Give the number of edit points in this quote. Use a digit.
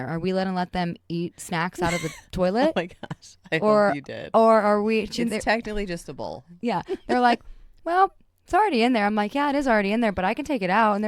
0